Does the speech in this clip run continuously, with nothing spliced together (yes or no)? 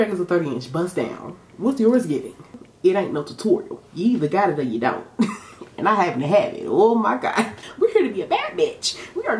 no